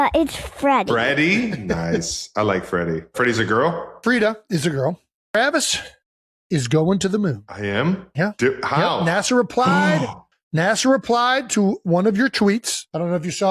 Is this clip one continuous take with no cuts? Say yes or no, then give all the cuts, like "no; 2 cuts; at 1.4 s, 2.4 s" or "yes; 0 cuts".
no; 1 cut; at 5.1 s